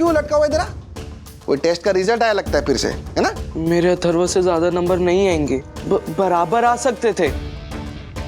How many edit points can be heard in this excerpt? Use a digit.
2